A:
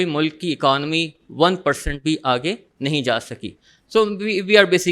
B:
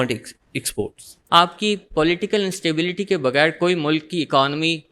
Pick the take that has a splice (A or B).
B